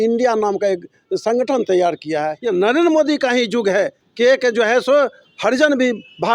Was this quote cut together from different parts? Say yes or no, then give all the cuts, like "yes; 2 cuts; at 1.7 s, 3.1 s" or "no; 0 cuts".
yes; 2 cuts; at 2.4 s, 4.0 s